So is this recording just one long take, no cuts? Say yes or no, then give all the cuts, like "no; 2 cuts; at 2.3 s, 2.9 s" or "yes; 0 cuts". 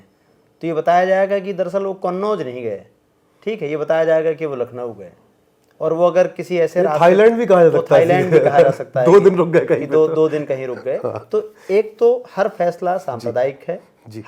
yes; 0 cuts